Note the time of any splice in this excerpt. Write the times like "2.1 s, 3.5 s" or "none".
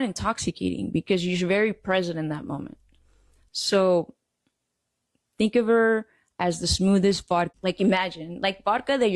7.5 s